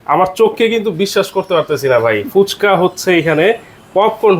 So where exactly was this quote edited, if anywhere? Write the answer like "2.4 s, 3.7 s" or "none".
none